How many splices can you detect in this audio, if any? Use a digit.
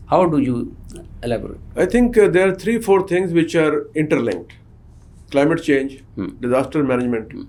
0